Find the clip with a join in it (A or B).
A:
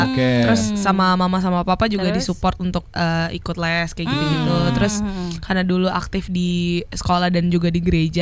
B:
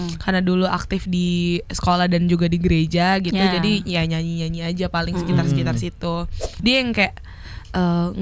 B